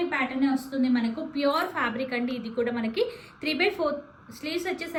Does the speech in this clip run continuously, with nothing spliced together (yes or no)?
yes